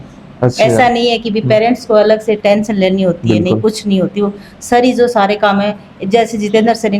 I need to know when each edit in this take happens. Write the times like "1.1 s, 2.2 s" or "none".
none